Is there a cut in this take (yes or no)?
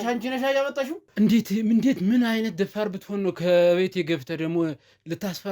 yes